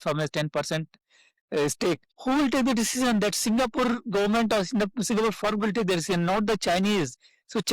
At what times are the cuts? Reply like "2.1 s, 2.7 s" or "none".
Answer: 2.1 s